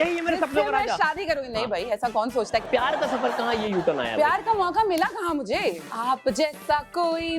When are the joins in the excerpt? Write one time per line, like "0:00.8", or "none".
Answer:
0:02.7
0:05.8